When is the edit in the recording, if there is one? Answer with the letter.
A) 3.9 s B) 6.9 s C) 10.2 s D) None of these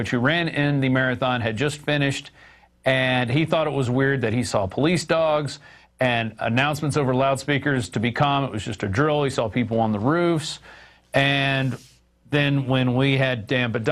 B